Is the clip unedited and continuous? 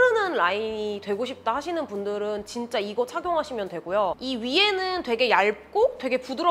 yes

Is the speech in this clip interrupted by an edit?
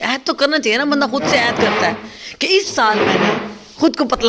no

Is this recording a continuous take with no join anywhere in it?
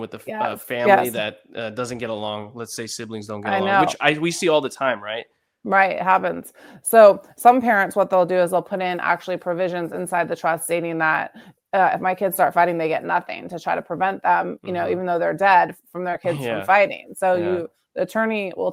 yes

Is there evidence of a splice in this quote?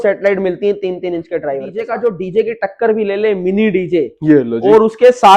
yes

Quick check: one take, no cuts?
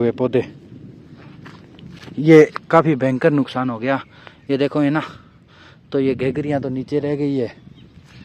yes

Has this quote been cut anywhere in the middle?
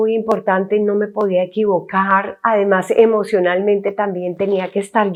no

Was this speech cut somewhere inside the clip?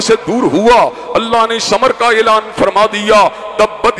no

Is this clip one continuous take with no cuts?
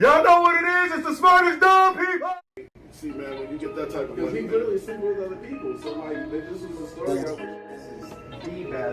no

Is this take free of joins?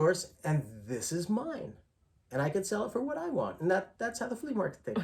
yes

